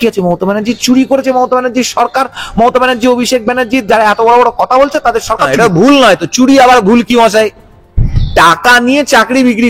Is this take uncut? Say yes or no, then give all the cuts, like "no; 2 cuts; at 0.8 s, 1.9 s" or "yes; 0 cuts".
no; 1 cut; at 5.5 s